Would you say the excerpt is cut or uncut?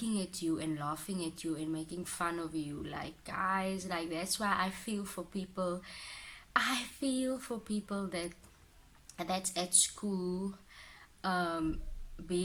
uncut